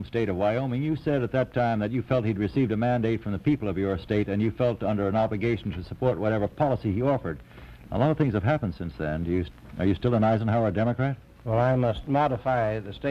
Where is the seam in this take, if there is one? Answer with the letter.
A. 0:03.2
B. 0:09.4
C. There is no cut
C